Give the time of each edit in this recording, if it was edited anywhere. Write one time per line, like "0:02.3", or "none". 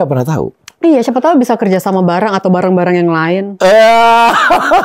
none